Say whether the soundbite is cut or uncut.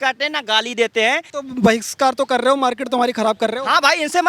cut